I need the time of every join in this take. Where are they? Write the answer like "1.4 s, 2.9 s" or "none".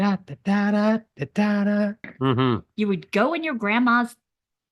2.1 s

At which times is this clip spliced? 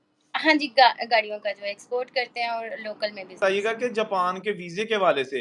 3.4 s

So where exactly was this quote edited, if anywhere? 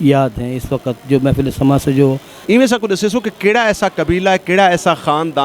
2.3 s

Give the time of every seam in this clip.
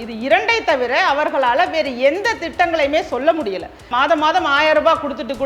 3.9 s

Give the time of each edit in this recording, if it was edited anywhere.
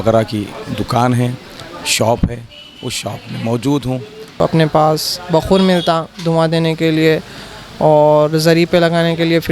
4.4 s

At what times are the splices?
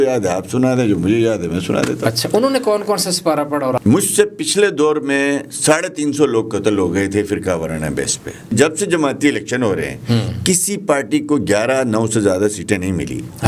3.8 s, 8.5 s

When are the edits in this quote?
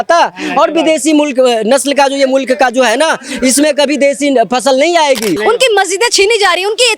5.4 s

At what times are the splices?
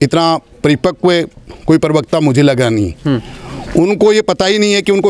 none

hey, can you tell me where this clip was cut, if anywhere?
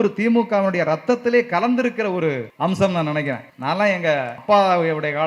2.5 s, 3.5 s, 4.4 s

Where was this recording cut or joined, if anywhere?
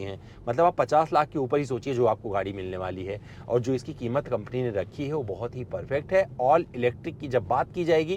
none

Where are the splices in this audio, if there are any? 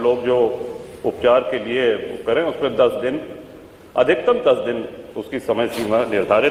none

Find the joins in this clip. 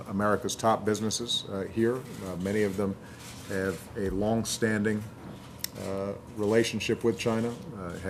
none

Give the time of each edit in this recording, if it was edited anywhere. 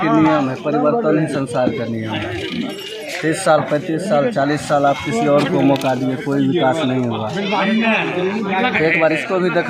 none

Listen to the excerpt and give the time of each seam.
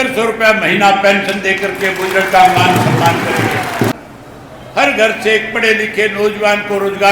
4.0 s

